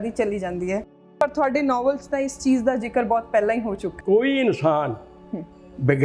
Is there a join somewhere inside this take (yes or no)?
yes